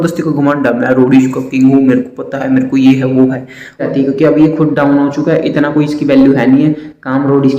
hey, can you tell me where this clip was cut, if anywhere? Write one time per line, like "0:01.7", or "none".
0:03.9